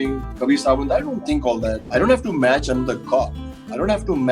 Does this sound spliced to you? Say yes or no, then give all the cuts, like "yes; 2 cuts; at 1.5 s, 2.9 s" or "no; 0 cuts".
yes; 1 cut; at 1.8 s